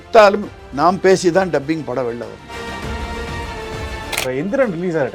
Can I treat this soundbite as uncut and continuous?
yes; 0 cuts

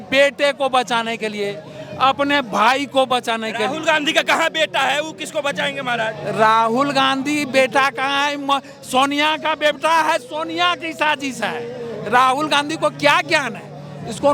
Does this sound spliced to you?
no; 0 cuts

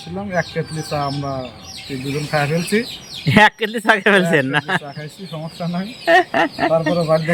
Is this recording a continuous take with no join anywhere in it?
yes; 0 cuts

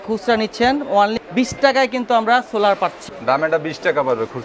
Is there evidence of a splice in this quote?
yes; 2 cuts; at 1.2 s, 3.1 s

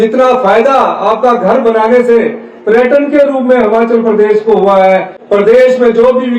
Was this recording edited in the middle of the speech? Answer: yes; 1 cut; at 5.1 s

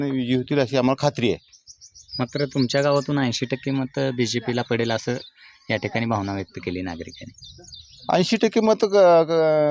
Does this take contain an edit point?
no; 0 cuts

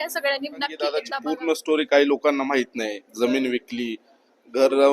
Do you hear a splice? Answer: yes; 1 cut; at 1.0 s

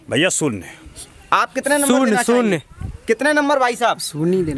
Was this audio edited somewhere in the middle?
no; 0 cuts

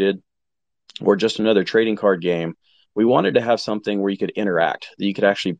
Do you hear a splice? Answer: no; 0 cuts

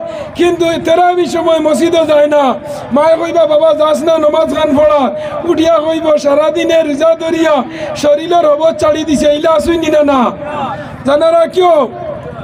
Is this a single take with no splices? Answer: yes; 0 cuts

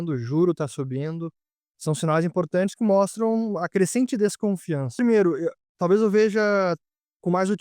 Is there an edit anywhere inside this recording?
yes; 1 cut; at 4.9 s

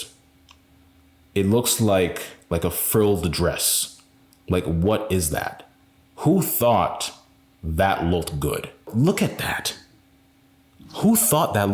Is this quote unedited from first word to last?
no; 1 cut; at 8.9 s

